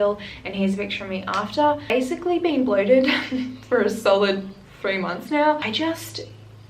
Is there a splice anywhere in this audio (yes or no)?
yes